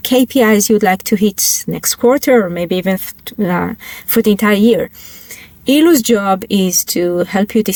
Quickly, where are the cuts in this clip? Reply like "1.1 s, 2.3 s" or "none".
none